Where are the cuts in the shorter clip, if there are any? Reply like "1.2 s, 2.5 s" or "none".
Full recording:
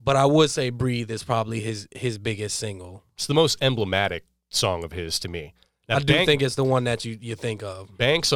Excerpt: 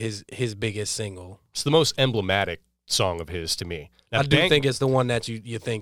3.9 s